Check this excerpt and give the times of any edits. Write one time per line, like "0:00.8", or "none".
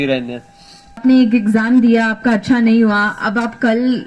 0:01.0